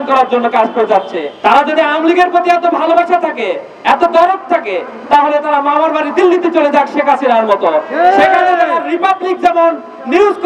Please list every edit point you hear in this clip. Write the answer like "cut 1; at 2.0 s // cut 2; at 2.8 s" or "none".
cut 1; at 1.2 s